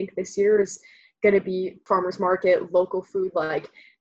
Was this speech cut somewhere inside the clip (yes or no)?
yes